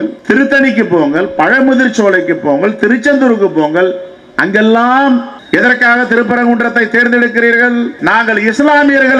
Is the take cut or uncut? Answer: cut